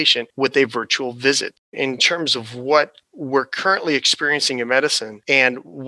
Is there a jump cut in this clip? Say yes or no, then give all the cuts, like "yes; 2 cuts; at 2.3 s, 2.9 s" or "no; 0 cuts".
yes; 1 cut; at 1.6 s